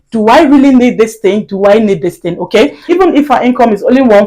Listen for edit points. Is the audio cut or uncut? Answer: cut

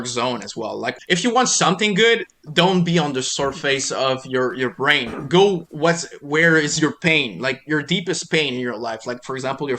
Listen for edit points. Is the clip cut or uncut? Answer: cut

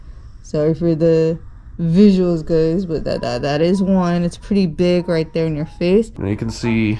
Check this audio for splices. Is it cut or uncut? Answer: cut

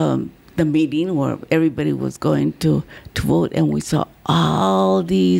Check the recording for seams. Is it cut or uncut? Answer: uncut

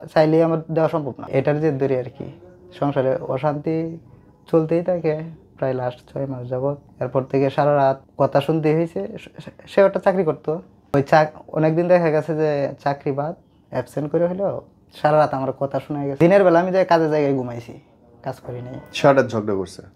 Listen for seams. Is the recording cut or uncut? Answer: cut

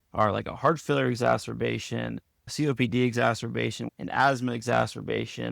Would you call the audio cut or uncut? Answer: cut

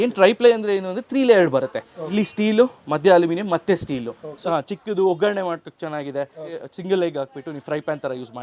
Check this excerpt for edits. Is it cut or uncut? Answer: cut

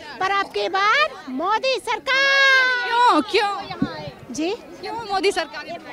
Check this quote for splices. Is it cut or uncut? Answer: uncut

